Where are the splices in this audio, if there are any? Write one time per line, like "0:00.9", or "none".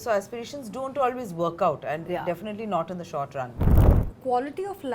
0:03.6